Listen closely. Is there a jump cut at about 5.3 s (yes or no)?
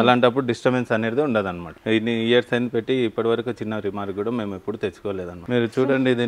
yes